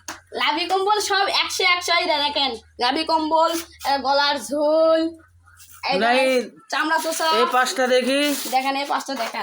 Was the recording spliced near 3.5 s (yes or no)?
no